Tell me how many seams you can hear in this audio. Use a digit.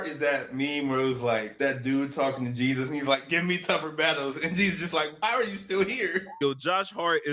2